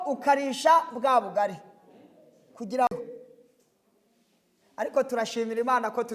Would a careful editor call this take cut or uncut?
uncut